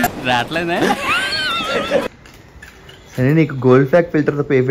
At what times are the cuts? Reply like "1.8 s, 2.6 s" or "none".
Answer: none